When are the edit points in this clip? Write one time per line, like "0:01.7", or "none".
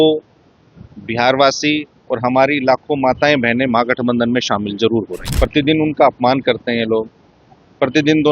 0:05.2